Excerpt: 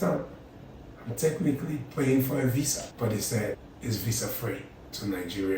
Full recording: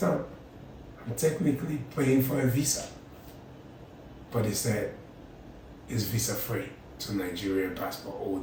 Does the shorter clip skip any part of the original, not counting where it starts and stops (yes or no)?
yes